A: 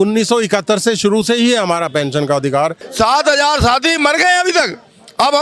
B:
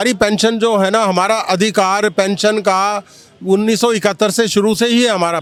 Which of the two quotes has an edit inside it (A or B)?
A